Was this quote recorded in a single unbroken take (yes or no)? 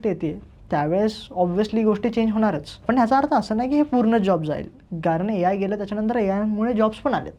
no